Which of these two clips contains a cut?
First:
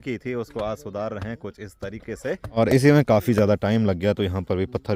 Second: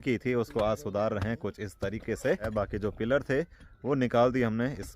second; 1 cut; at 2.4 s

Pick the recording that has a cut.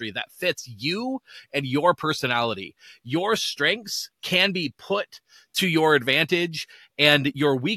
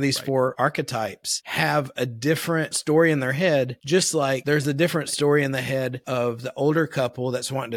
second; 4 cuts; at 0.9 s, 2.8 s, 4.0 s, 6.0 s

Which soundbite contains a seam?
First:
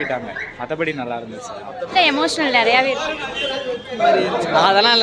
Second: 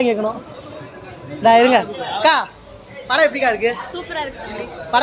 first; 2 cuts; at 1.9 s, 4.0 s

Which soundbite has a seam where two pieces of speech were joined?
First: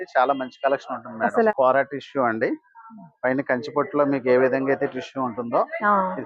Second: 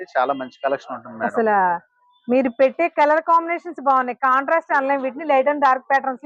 first; 1 cut; at 1.5 s

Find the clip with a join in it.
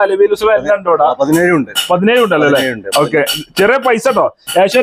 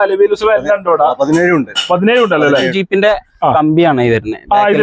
second; 1 cut; at 2.8 s

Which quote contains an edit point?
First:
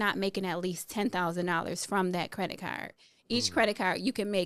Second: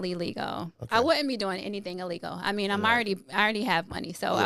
first; 1 cut; at 2.9 s

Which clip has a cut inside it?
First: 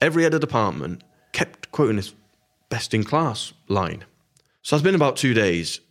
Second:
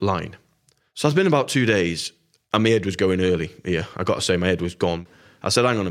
second; 1 cut; at 5.0 s

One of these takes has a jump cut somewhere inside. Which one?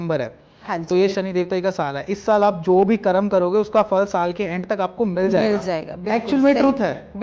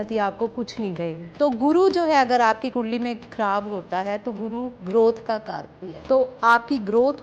second; 2 cuts; at 1.2 s, 5.9 s

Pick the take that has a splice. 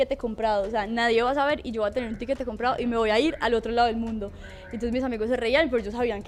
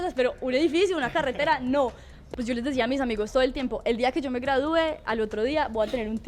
second; 1 cut; at 2.1 s

